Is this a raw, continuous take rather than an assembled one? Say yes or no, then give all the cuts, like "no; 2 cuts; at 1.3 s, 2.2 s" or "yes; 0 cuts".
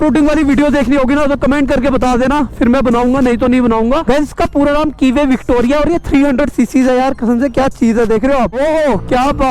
no; 2 cuts; at 4.0 s, 8.6 s